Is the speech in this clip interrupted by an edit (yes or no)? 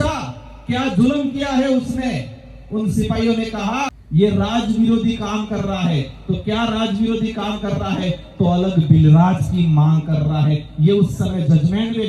yes